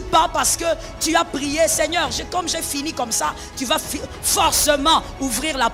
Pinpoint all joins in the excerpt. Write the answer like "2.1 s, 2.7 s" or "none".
none